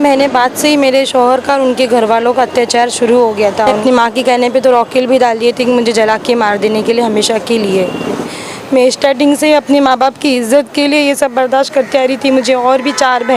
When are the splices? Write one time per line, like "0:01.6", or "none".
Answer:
0:03.8
0:08.3